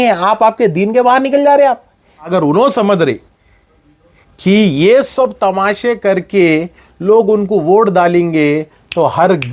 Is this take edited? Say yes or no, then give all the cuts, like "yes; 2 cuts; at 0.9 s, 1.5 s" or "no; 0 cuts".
yes; 1 cut; at 2.3 s